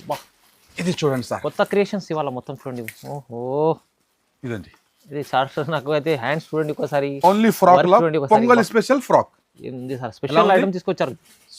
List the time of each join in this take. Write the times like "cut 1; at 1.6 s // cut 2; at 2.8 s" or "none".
none